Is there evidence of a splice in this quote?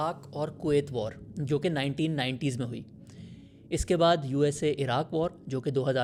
no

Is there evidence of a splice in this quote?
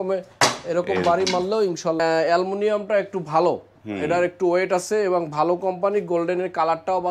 yes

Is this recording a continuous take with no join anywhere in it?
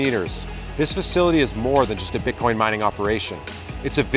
yes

